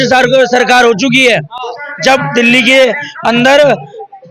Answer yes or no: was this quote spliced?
no